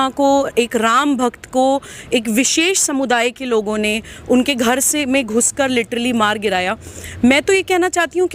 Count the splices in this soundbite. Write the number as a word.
zero